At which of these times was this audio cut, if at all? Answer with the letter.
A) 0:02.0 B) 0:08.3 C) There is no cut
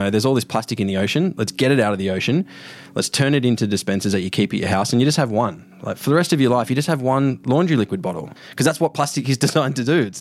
B